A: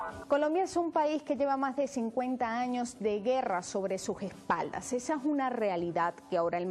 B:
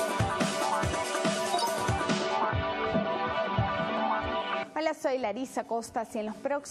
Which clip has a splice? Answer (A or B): A